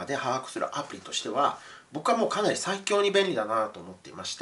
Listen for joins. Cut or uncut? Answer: uncut